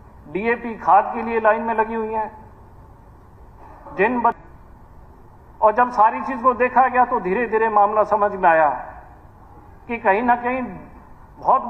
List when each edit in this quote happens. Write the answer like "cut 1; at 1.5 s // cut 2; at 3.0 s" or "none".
cut 1; at 4.4 s